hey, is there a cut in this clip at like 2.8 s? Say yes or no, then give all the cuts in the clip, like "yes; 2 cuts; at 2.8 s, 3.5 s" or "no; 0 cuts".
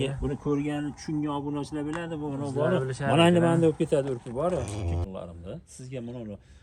no; 1 cut; at 5.0 s